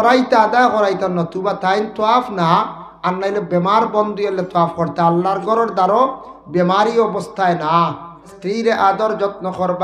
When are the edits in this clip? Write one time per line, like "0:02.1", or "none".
0:08.4